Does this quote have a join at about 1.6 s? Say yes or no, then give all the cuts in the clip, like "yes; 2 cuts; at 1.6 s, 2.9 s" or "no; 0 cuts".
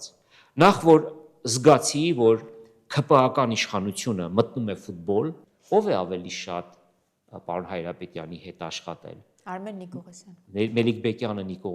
no; 1 cut; at 5.5 s